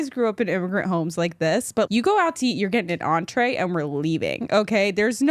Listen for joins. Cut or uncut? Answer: cut